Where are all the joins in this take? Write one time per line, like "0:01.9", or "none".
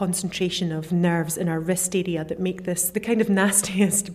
0:00.9
0:02.9